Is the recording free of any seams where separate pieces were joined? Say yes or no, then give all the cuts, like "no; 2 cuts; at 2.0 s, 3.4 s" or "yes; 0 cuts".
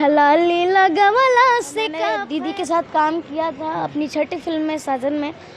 no; 1 cut; at 2.1 s